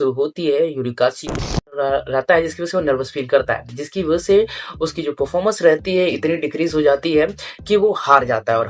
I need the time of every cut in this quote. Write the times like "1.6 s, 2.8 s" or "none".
1.6 s